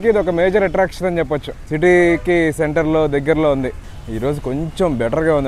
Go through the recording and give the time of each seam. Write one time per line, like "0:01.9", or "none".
none